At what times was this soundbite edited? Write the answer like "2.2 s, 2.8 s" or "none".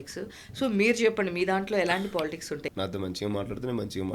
2.6 s